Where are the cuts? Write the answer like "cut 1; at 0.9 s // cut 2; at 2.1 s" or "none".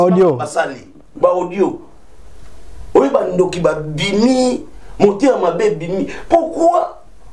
none